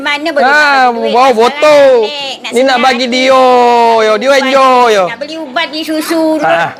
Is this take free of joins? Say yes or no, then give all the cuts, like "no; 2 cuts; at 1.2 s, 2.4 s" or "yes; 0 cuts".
yes; 0 cuts